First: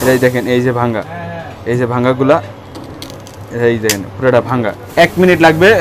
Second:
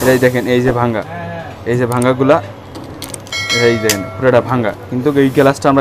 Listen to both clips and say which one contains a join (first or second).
first